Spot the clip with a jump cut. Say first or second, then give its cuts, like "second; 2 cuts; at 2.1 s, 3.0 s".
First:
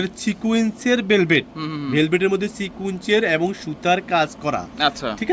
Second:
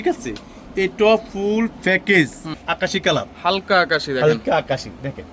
second; 1 cut; at 2.5 s